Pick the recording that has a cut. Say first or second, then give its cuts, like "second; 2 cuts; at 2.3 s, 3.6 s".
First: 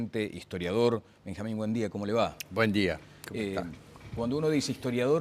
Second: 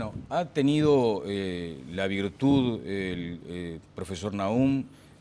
first; 1 cut; at 4.2 s